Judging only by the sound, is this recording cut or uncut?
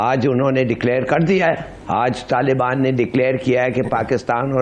cut